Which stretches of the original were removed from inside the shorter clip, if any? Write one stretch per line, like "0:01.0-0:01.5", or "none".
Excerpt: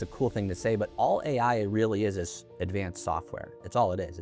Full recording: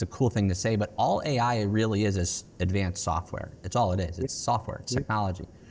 none